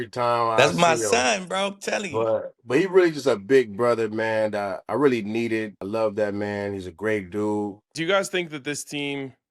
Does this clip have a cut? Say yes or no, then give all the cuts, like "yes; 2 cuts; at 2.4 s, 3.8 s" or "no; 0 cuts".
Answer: yes; 3 cuts; at 4.8 s, 5.8 s, 7.9 s